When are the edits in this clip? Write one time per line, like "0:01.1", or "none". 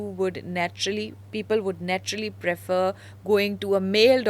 none